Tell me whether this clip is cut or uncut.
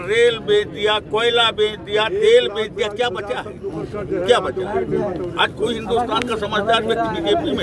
uncut